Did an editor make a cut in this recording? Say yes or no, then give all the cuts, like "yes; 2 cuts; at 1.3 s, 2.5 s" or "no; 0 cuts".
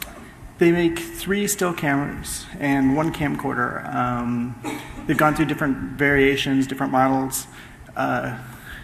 yes; 1 cut; at 5.6 s